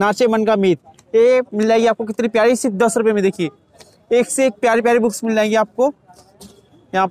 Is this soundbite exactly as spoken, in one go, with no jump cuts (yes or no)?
yes